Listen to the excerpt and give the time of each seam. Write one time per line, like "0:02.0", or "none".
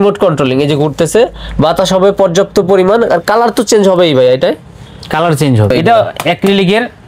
0:05.7